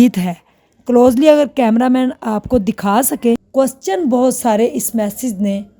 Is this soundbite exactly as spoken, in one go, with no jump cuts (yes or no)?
no